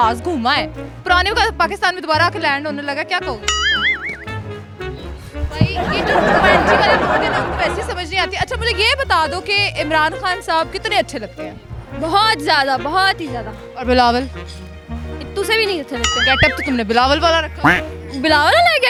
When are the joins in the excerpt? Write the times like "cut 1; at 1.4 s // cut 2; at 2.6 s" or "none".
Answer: none